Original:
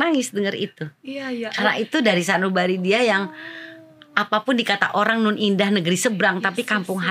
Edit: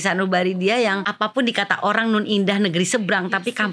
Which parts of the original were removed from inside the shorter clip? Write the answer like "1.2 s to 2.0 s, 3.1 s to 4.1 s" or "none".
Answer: 3.3 s to 4.2 s